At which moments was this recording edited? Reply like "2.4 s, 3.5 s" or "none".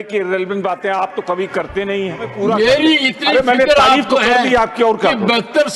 2.3 s